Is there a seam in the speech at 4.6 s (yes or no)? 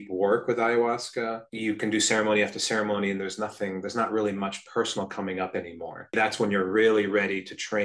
no